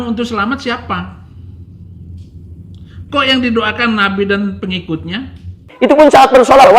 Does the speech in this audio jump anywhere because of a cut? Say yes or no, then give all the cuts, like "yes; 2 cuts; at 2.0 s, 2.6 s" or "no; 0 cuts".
yes; 1 cut; at 5.7 s